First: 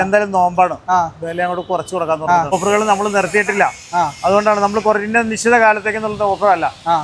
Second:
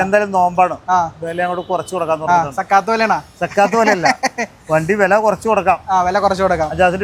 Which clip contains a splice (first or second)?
first